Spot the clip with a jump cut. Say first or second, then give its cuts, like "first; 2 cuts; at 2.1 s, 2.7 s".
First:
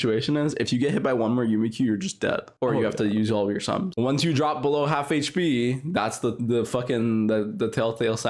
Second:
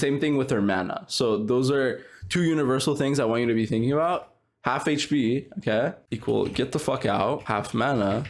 first; 1 cut; at 3.9 s